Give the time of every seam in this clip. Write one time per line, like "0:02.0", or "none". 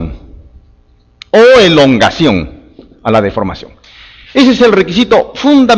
0:02.4